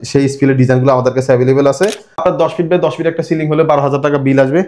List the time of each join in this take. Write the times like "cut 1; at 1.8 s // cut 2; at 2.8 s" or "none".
cut 1; at 2.2 s